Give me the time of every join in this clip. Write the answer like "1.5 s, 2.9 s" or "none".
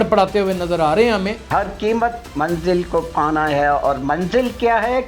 1.4 s